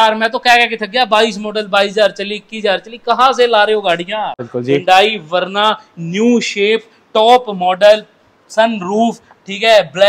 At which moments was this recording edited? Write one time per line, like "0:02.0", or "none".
0:04.5

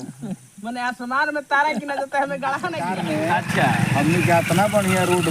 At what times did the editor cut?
0:02.8

